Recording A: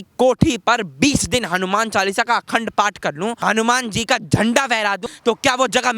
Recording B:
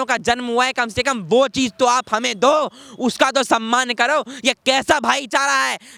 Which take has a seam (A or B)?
A